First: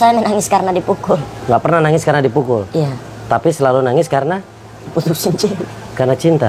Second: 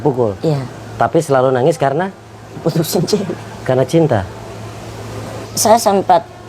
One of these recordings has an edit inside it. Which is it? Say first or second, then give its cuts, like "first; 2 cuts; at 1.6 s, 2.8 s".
second; 1 cut; at 5.4 s